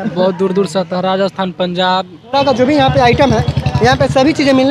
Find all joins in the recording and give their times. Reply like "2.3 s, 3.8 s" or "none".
2.3 s

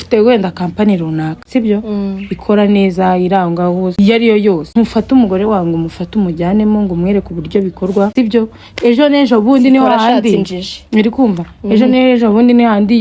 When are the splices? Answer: 1.4 s, 3.9 s, 4.6 s, 8.1 s

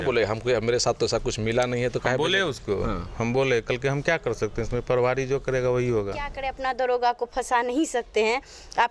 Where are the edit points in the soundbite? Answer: 6.4 s

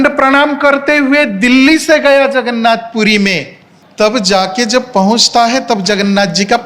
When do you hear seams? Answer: 3.8 s

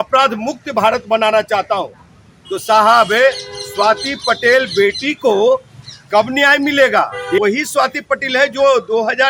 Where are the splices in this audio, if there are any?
7.4 s

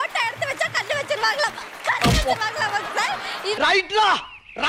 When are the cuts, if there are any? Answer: none

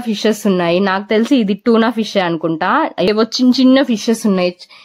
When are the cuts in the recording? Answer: 3.1 s

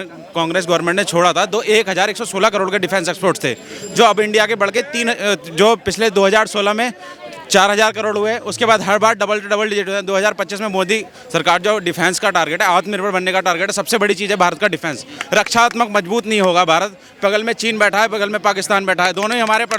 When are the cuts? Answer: none

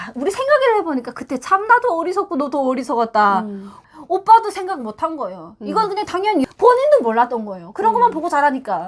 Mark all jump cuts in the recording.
3.7 s, 6.4 s

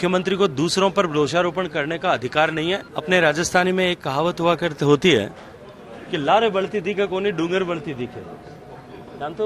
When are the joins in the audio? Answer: 2.9 s

